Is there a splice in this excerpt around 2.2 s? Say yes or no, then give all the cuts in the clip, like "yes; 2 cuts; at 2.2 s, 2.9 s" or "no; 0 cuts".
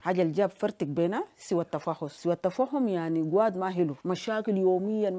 no; 0 cuts